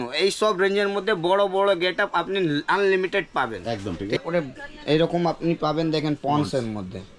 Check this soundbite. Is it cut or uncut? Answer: cut